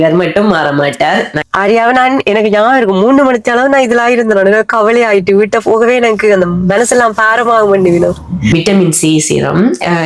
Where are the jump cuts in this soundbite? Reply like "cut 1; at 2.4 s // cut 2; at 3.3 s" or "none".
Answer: cut 1; at 1.4 s // cut 2; at 8.5 s

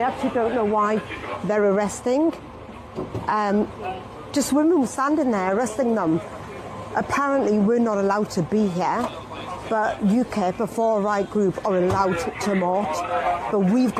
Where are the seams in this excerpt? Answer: none

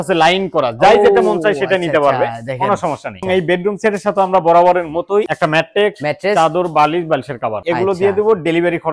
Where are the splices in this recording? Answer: cut 1; at 3.2 s // cut 2; at 5.3 s // cut 3; at 7.6 s

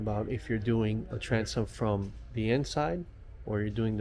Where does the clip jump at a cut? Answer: none

